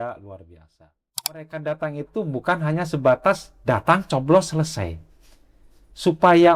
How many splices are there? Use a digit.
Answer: 1